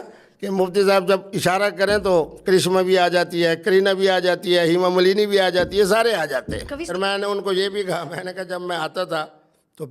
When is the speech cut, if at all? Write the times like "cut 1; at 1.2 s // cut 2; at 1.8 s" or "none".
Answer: cut 1; at 6.9 s

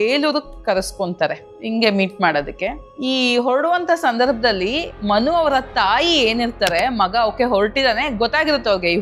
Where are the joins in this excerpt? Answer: cut 1; at 1.5 s // cut 2; at 2.9 s

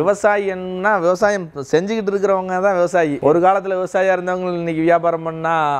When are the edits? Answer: none

